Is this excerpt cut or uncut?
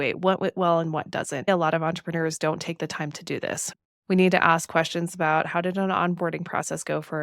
cut